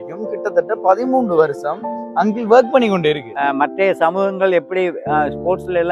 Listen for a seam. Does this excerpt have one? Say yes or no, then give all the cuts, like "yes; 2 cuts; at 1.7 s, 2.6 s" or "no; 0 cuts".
yes; 1 cut; at 3.3 s